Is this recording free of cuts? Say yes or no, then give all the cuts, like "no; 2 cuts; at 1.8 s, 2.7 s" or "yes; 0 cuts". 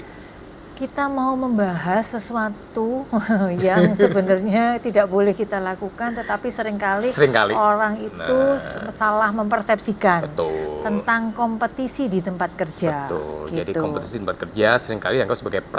yes; 0 cuts